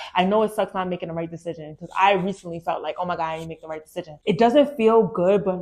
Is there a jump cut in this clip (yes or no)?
yes